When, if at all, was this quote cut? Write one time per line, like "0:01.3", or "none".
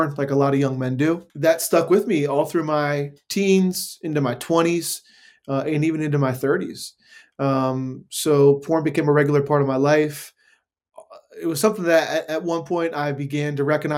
0:01.3